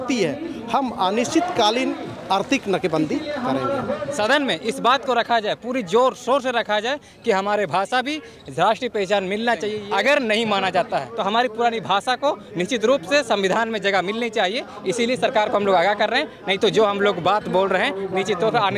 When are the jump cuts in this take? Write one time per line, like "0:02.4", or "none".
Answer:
0:04.0
0:09.8
0:11.1